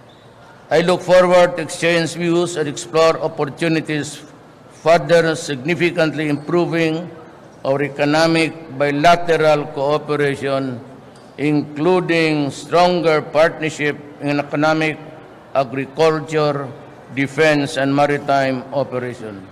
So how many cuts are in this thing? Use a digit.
1